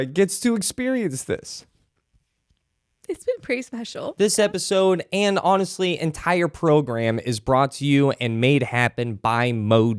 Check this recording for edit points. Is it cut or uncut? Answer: cut